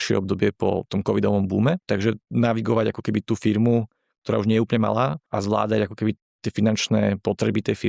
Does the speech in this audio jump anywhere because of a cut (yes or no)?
yes